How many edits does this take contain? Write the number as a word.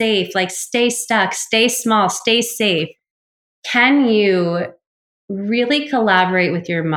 one